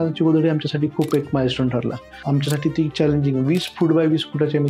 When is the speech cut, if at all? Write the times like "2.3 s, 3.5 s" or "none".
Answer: 2.2 s